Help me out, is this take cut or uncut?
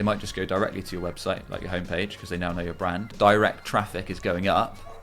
cut